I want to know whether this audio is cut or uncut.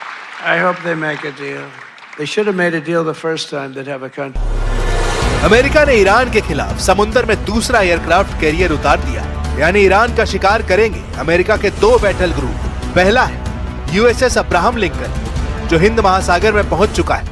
cut